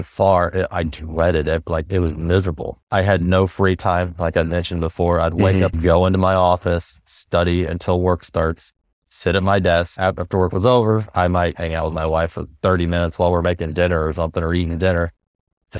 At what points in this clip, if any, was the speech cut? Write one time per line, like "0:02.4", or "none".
0:02.7